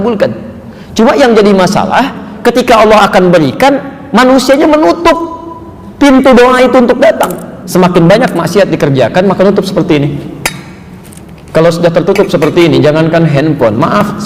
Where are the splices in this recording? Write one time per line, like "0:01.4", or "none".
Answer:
0:07.6